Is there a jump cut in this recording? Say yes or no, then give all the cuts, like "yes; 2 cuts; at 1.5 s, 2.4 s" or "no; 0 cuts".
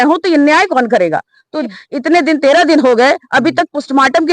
yes; 1 cut; at 1.7 s